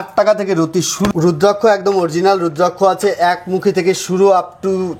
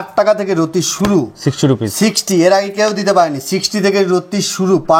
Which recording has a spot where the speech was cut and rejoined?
first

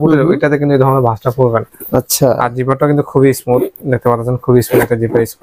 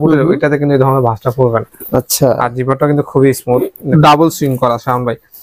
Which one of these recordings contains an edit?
second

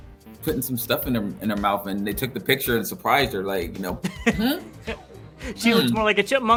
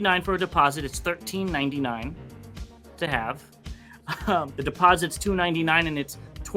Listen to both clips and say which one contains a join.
second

